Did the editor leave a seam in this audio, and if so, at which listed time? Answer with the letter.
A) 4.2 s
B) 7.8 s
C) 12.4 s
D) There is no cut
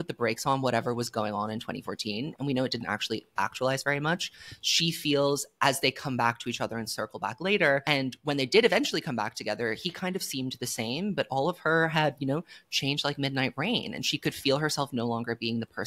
B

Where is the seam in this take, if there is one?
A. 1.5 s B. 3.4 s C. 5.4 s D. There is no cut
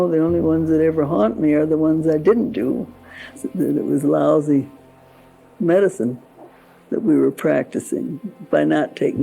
B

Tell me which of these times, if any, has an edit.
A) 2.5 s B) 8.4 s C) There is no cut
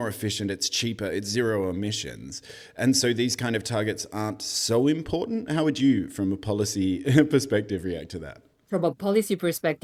C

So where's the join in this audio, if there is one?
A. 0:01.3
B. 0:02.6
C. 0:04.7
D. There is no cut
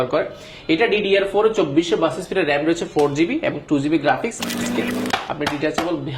C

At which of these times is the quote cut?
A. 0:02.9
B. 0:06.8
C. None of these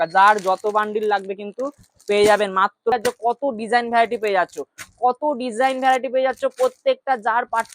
A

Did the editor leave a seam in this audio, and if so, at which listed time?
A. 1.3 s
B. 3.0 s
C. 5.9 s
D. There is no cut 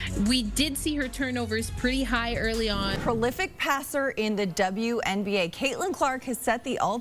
B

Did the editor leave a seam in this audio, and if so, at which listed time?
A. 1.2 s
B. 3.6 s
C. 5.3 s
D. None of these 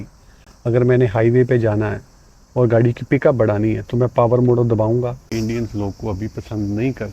C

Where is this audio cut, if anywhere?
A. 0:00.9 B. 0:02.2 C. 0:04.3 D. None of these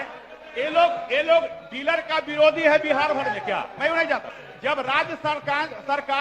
C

